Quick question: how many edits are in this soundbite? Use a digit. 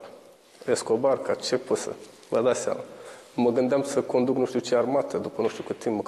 1